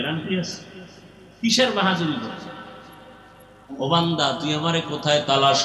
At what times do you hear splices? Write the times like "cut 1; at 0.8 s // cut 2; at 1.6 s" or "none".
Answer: cut 1; at 3.7 s